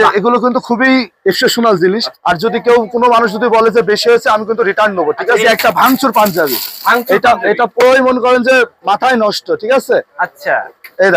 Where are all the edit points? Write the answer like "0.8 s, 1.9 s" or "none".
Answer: 2.1 s, 5.4 s